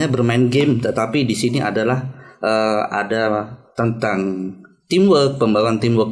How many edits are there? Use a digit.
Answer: 0